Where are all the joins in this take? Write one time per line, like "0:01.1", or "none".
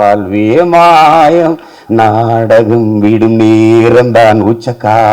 none